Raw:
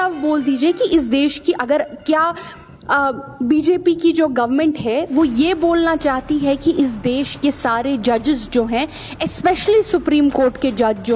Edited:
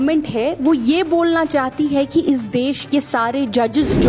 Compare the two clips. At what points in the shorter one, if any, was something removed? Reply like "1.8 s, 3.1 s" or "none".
none